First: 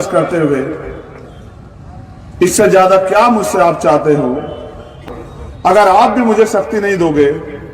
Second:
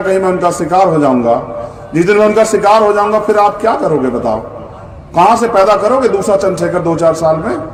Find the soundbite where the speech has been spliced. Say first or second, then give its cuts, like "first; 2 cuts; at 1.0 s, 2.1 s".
first; 1 cut; at 5.0 s